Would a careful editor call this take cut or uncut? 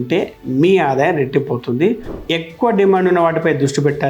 cut